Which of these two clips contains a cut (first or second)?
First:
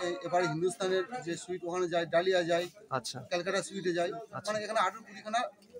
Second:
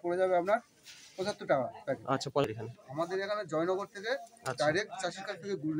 second